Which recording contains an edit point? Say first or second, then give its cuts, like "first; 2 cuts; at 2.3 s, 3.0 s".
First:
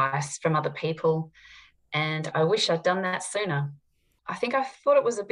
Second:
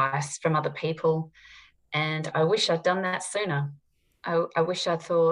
first; 1 cut; at 4.1 s